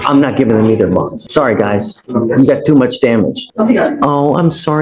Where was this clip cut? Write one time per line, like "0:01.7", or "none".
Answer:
0:01.2
0:03.4